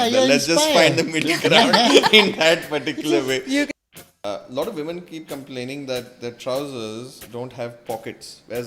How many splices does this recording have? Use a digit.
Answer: 1